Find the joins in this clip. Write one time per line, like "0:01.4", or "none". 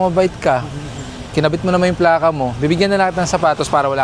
none